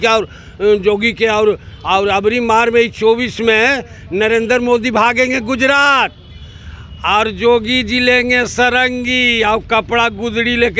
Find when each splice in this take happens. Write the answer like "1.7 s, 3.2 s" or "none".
none